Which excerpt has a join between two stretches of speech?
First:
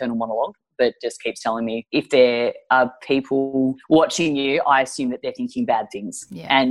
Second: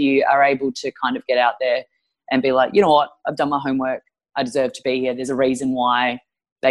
first; 2 cuts; at 1.8 s, 3.8 s

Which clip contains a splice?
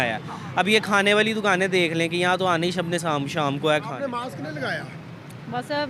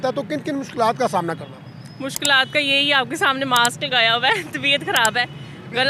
first; 1 cut; at 4.1 s

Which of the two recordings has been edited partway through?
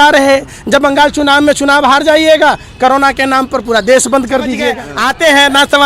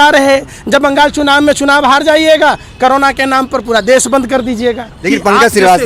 first; 1 cut; at 4.9 s

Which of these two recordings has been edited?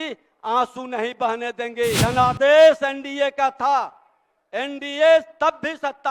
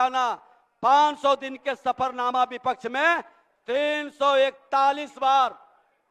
first; 1 cut; at 2.0 s

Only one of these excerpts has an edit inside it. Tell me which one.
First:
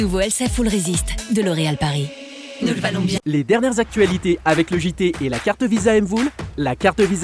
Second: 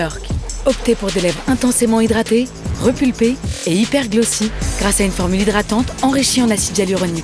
first; 1 cut; at 3.2 s

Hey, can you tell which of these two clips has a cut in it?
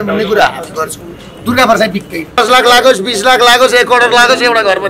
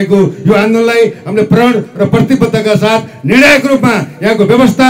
first; 1 cut; at 2.2 s

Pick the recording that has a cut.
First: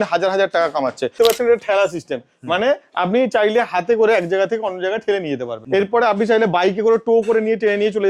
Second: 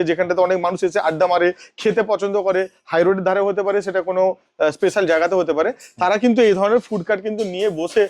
first; 2 cuts; at 1.1 s, 5.5 s

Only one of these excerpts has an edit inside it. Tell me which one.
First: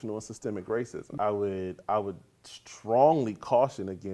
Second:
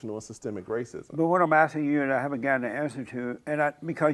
first; 1 cut; at 1.1 s

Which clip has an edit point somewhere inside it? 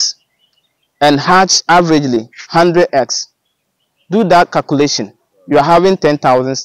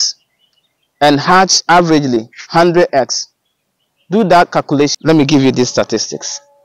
second; 1 cut; at 5.0 s

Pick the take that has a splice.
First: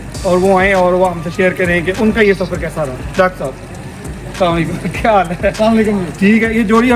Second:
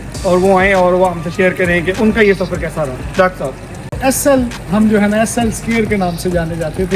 second; 1 cut; at 4.0 s

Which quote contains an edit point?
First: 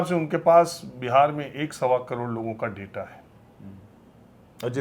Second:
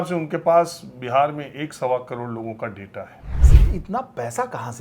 second; 1 cut; at 3.6 s

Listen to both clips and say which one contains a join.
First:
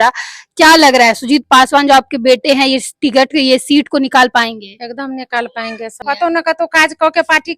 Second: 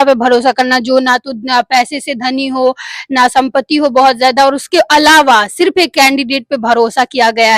first; 1 cut; at 6.0 s

